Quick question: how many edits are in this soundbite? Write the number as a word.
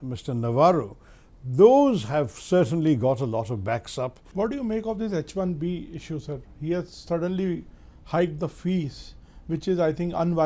one